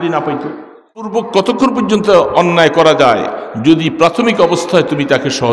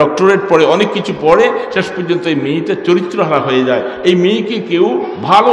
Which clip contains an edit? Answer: first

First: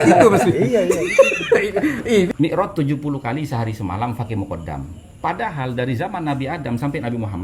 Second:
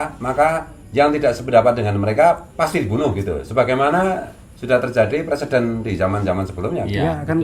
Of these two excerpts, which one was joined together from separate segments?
first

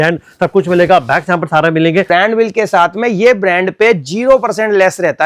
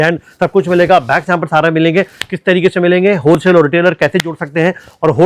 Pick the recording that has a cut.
first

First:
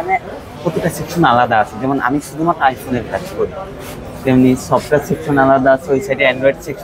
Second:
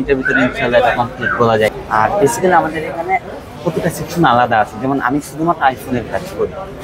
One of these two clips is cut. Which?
second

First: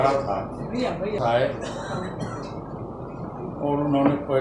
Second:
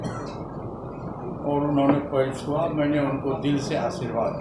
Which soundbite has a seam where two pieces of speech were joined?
first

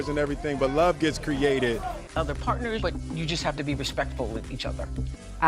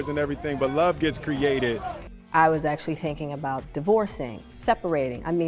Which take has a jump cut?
second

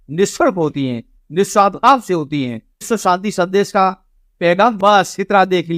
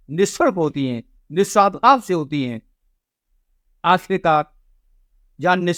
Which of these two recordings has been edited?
first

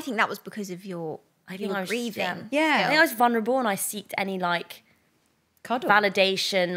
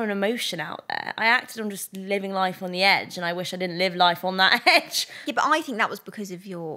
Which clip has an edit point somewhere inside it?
first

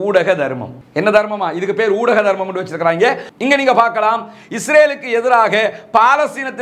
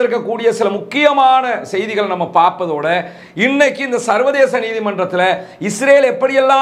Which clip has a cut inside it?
first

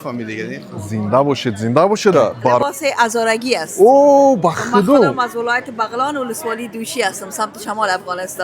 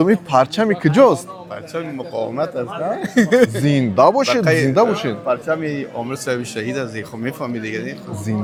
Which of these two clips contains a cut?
first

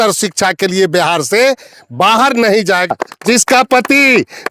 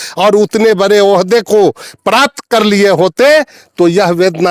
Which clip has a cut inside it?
first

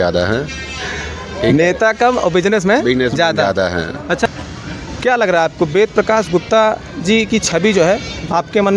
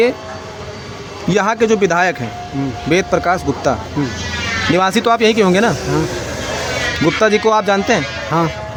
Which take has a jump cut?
first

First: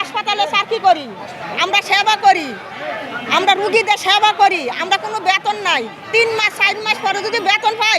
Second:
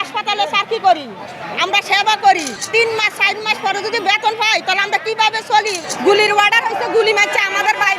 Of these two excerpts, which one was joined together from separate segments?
second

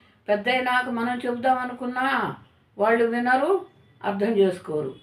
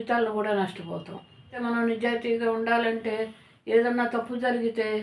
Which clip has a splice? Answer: second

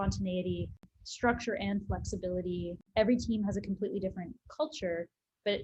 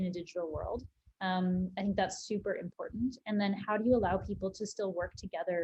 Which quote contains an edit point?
first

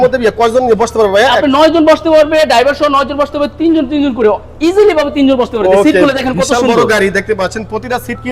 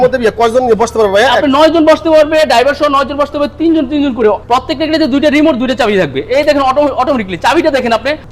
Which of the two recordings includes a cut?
second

